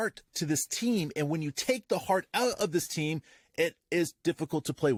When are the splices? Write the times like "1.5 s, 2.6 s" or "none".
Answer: none